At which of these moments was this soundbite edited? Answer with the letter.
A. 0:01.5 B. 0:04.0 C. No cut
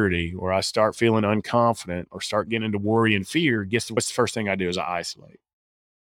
B